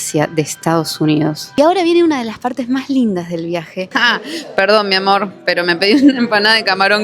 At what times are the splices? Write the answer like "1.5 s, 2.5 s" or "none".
1.5 s, 3.9 s